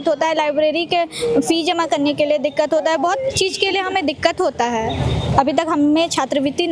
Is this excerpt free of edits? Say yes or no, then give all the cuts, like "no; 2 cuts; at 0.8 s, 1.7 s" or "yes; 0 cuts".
yes; 0 cuts